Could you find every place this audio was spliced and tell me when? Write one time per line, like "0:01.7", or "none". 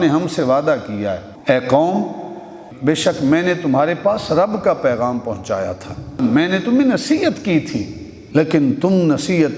0:01.3
0:02.6
0:06.2
0:08.2